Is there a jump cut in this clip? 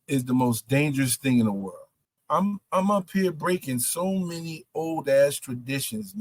yes; 1 cut; at 2.2 s

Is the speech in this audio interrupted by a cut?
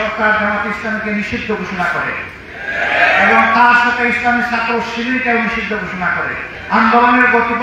yes; 1 cut; at 6.5 s

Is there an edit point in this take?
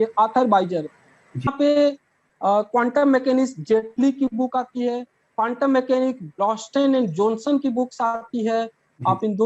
yes; 1 cut; at 1.5 s

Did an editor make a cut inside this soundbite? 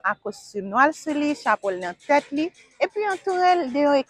no; 0 cuts

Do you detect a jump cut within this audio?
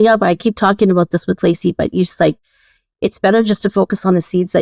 no; 0 cuts

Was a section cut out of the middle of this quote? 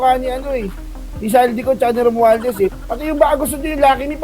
yes; 1 cut; at 2.8 s

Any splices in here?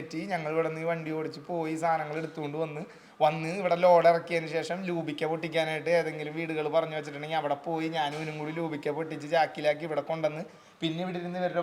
no; 0 cuts

